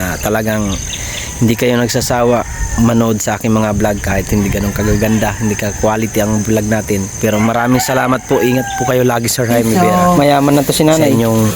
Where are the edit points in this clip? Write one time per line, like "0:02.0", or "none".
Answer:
0:09.7
0:10.5